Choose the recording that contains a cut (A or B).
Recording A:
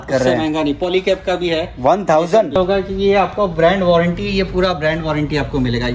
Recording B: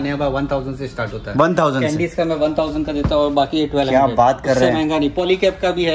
A